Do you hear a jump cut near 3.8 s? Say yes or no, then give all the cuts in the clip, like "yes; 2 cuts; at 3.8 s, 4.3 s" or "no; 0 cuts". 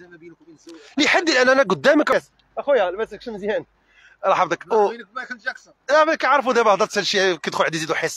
no; 1 cut; at 2.1 s